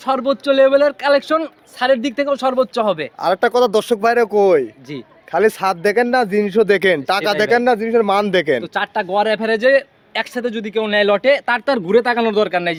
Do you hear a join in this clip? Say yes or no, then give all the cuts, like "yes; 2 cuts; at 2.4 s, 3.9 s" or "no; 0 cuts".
no; 0 cuts